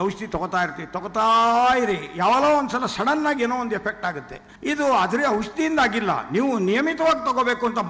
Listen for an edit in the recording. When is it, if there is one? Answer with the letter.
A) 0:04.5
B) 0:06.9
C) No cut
C